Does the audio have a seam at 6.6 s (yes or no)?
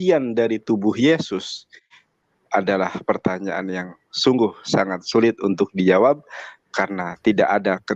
no